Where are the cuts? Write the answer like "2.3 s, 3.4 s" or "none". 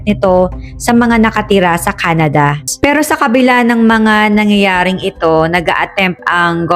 2.7 s

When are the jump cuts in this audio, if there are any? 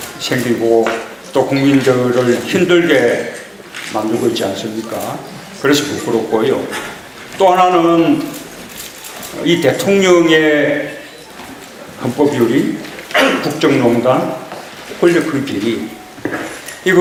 none

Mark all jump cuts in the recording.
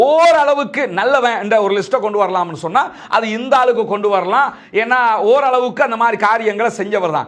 3.0 s

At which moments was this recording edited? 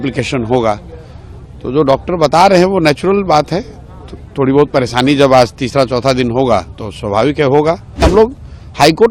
8.0 s

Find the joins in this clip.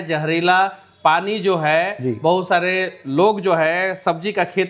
none

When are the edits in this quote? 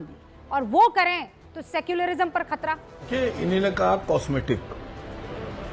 3.1 s

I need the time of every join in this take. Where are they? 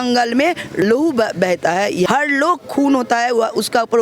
0.8 s, 2.1 s

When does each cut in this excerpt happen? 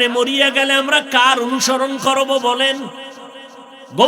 none

